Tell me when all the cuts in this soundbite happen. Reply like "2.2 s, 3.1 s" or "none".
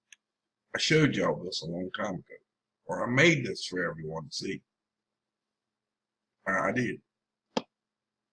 6.7 s